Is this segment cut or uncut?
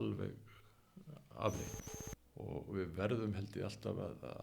cut